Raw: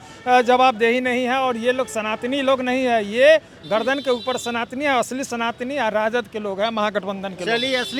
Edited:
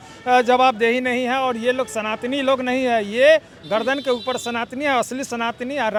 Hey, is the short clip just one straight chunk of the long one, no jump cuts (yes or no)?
yes